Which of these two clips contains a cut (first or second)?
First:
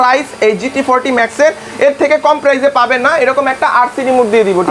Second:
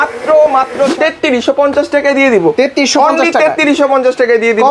second